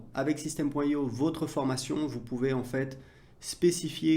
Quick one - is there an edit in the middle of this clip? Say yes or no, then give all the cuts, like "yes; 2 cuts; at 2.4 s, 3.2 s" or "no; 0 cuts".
no; 0 cuts